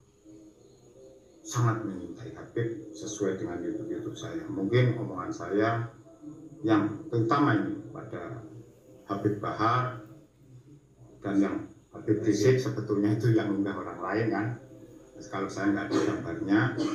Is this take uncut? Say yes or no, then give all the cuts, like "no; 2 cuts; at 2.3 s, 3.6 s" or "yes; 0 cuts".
yes; 0 cuts